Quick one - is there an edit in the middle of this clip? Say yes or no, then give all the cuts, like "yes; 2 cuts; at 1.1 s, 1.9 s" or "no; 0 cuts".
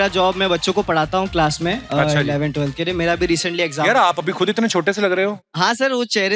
yes; 1 cut; at 5.4 s